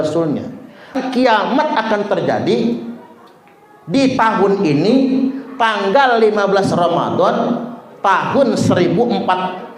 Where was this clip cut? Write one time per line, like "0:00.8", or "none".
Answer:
0:01.0